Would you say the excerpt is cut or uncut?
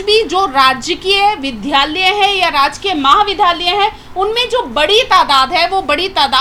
uncut